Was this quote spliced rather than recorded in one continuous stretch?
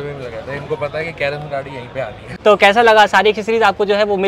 yes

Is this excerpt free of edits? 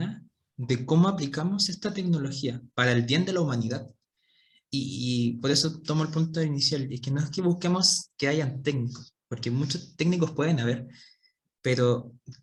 yes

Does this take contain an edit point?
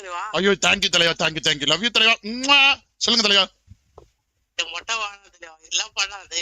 no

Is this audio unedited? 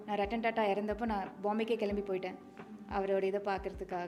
yes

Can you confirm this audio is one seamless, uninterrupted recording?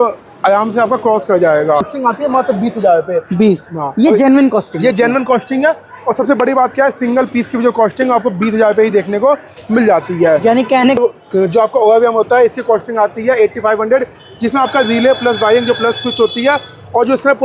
no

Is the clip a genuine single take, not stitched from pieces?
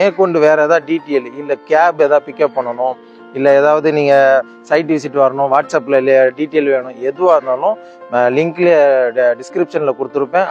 yes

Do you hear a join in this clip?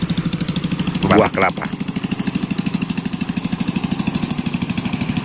yes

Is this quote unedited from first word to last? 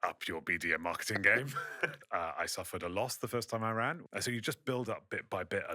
no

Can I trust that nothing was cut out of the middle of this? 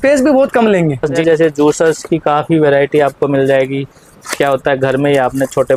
no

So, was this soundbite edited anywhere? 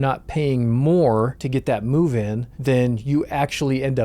yes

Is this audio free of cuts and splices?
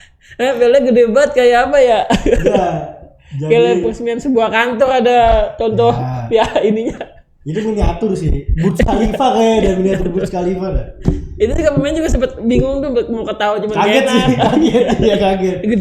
yes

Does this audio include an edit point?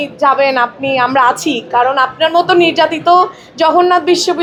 no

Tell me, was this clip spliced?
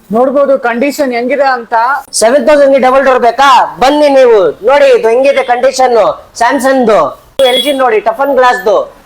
yes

